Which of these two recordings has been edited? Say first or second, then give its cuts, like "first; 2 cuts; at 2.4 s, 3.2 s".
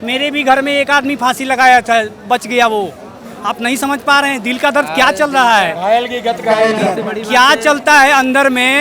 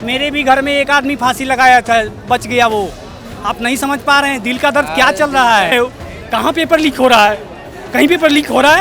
second; 1 cut; at 5.7 s